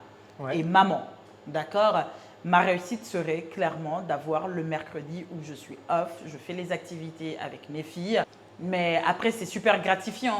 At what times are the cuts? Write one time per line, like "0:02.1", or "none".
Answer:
0:08.4